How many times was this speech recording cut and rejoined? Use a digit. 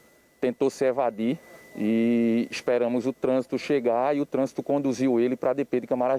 1